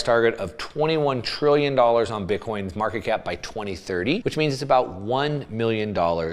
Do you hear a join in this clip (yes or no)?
yes